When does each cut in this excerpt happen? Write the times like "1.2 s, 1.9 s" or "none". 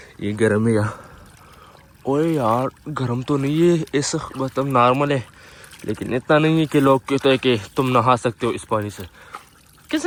none